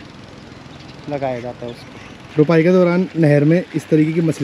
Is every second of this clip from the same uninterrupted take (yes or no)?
no